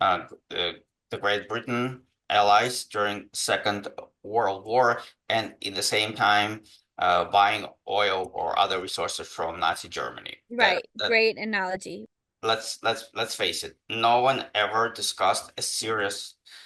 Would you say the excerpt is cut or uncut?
cut